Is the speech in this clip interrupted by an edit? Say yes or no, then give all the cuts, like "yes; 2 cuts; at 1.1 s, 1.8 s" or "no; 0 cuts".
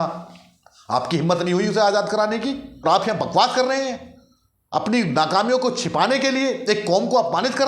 yes; 1 cut; at 2.7 s